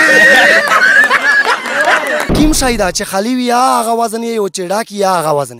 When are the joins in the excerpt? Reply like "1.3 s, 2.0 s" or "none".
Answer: 2.3 s